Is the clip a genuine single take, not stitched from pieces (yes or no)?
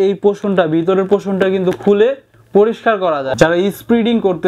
no